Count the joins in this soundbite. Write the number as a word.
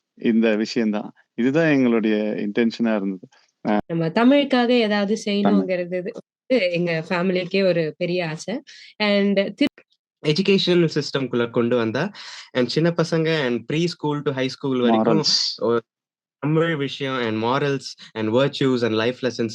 two